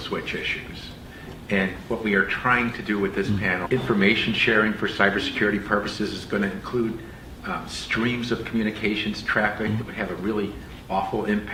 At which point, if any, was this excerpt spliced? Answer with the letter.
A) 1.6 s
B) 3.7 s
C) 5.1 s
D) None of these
D